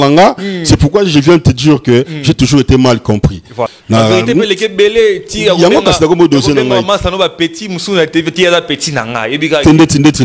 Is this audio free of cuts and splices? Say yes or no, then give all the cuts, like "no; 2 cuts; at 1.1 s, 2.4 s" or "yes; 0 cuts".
no; 1 cut; at 3.7 s